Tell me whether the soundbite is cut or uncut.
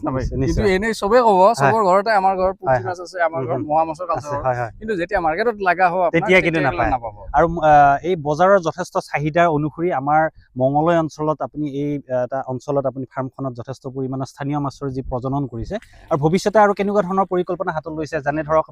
uncut